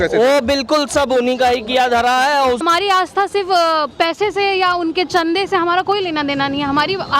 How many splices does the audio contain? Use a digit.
1